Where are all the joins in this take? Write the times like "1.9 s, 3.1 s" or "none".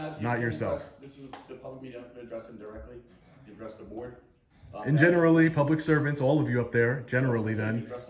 none